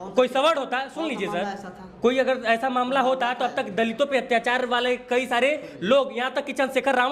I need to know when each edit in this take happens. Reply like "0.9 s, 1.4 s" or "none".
none